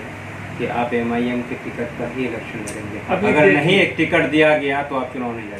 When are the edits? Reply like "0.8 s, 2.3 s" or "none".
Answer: none